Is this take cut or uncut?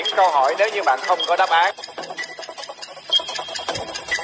cut